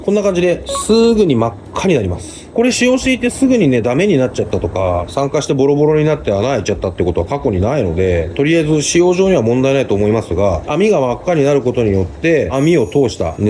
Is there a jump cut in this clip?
no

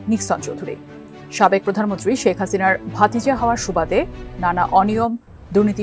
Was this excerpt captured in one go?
yes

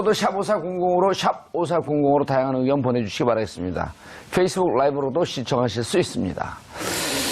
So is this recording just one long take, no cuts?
yes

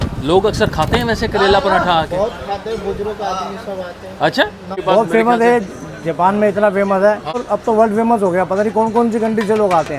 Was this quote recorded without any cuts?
no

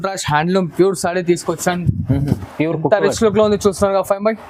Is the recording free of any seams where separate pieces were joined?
yes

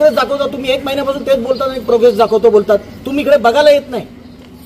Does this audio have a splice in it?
no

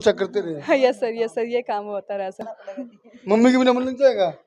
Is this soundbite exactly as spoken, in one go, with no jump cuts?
no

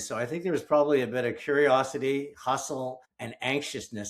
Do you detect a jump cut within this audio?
yes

